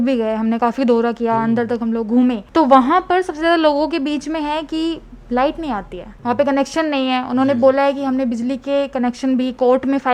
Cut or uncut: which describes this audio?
uncut